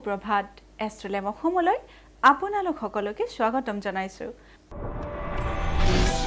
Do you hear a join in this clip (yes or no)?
no